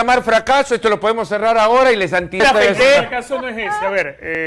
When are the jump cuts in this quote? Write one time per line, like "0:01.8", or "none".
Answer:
0:02.4

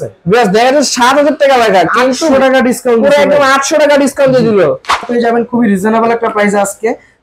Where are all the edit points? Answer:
0:05.1

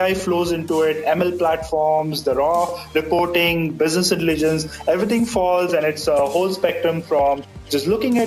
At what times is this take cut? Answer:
none

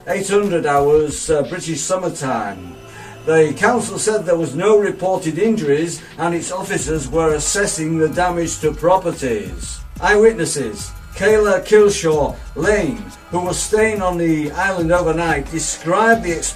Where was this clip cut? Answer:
none

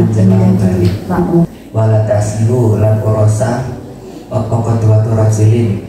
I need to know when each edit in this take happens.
0:01.6

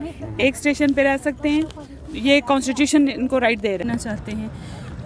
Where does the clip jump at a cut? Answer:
0:03.8

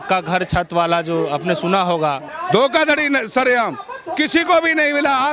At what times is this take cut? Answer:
0:02.3

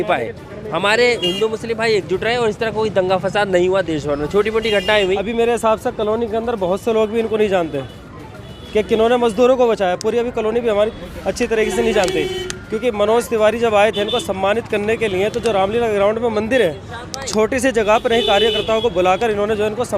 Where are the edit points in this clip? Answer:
0:05.2

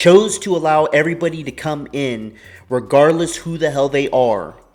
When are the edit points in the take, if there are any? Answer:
none

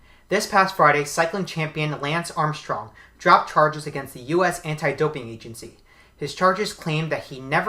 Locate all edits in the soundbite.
0:06.8

